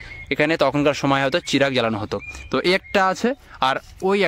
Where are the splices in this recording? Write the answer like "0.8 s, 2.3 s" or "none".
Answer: none